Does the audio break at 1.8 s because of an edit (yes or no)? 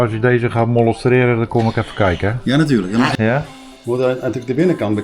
no